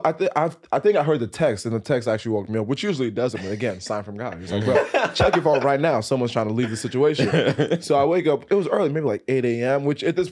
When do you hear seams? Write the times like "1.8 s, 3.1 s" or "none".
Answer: none

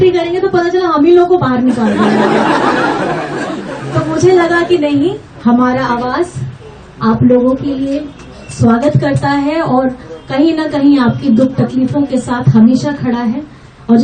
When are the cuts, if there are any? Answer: none

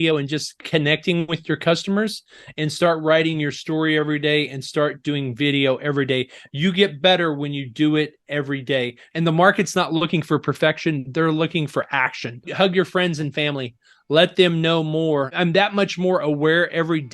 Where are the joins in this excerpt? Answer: 9.0 s, 12.5 s, 15.3 s

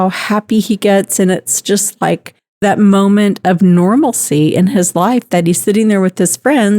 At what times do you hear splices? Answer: 2.6 s

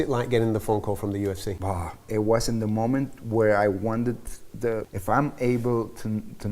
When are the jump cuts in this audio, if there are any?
1.5 s, 4.9 s

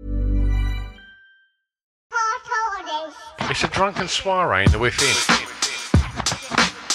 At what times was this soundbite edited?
1.9 s

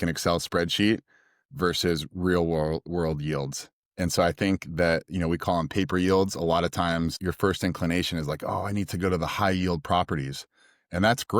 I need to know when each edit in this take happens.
7.2 s

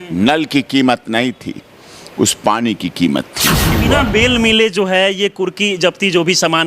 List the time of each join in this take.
3.7 s

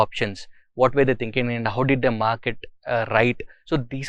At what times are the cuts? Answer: none

